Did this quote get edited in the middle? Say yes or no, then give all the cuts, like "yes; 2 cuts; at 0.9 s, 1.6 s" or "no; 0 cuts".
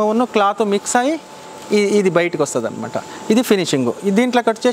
no; 0 cuts